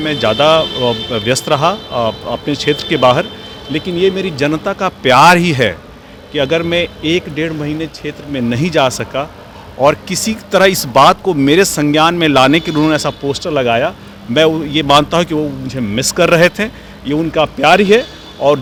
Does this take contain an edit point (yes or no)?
no